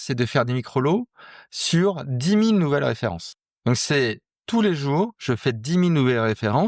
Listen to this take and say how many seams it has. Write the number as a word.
one